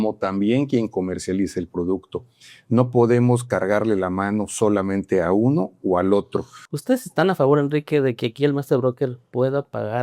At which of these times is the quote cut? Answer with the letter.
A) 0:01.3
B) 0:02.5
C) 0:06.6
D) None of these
C